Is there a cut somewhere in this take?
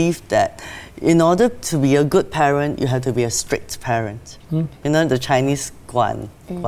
no; 0 cuts

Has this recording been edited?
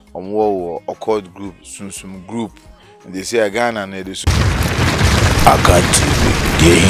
yes; 1 cut; at 4.1 s

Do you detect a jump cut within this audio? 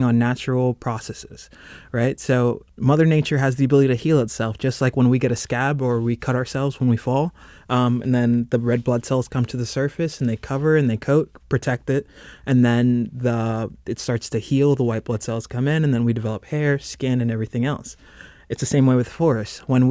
yes; 1 cut; at 2.7 s

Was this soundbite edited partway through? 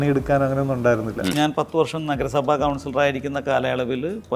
yes; 1 cut; at 1.3 s

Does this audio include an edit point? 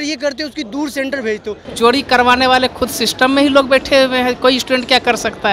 yes; 1 cut; at 1.6 s

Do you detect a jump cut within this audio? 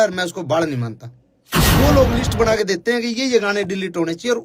yes; 1 cut; at 1.7 s

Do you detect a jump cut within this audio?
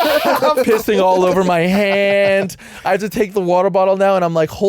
no; 0 cuts

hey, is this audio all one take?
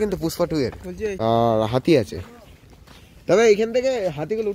no; 1 cut; at 1.1 s

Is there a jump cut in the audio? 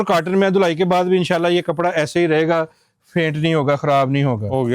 no; 0 cuts

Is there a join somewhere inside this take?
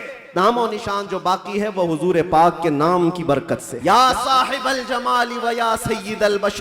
yes; 1 cut; at 3.7 s

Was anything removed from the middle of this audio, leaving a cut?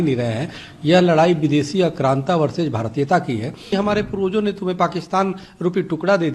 yes; 1 cut; at 3.7 s

